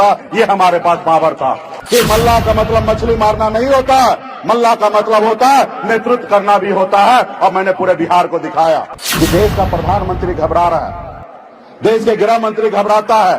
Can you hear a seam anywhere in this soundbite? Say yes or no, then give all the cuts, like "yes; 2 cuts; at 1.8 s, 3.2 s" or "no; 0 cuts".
yes; 2 cuts; at 1.7 s, 9.0 s